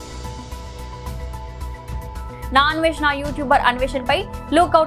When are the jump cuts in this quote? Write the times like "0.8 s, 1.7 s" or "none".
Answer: 2.3 s